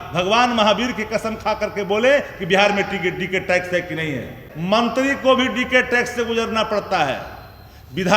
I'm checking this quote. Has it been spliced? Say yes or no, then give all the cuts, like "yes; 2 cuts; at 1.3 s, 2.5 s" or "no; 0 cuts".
yes; 1 cut; at 4.5 s